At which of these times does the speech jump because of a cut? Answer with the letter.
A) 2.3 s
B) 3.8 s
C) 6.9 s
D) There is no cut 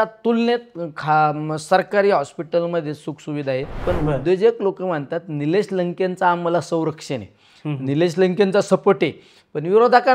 B